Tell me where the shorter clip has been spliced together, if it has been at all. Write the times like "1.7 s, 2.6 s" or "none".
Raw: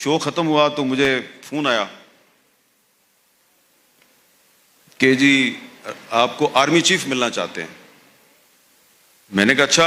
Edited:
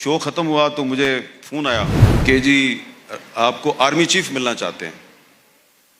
2.1 s